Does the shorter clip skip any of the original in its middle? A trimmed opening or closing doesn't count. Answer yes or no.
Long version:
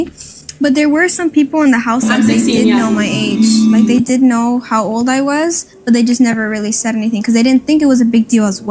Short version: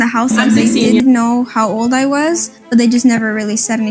yes